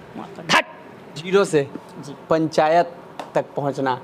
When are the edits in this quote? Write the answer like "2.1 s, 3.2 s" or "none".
1.2 s